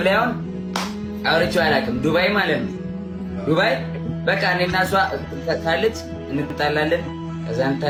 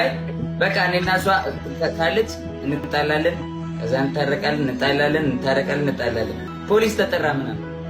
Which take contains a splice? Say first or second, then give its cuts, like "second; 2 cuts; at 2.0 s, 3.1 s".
second; 1 cut; at 6.5 s